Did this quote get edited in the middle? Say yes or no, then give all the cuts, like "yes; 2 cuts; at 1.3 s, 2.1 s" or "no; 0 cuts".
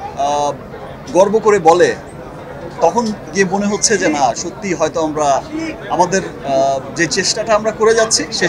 no; 0 cuts